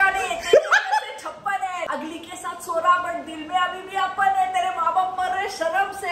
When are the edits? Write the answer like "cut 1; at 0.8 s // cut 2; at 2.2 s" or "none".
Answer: cut 1; at 1.9 s